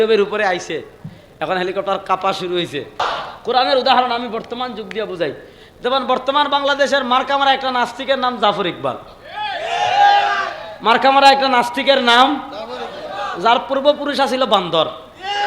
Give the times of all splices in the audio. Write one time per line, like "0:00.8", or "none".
0:03.0